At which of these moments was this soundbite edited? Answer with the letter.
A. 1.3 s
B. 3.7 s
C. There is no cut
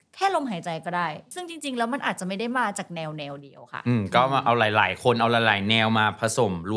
A